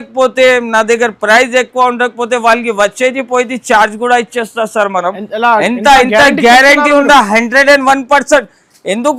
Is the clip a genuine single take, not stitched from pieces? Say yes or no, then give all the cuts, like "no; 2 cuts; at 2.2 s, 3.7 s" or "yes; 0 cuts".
yes; 0 cuts